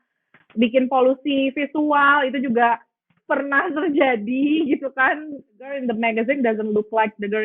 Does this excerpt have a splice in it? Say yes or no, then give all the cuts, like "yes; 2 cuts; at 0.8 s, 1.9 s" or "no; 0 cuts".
yes; 1 cut; at 5.8 s